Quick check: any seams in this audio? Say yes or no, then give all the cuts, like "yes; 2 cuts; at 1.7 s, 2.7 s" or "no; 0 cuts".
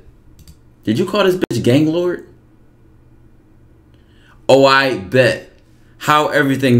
no; 0 cuts